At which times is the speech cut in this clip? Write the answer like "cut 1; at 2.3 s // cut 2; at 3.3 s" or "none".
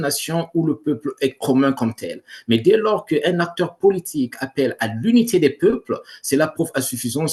none